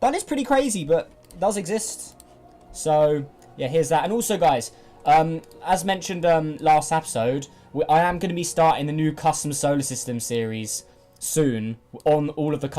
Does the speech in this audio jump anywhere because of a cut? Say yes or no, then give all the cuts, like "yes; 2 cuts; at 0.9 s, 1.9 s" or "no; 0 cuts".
yes; 1 cut; at 10.4 s